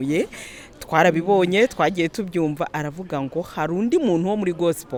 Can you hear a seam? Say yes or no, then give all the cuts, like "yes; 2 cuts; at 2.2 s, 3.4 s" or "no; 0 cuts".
no; 0 cuts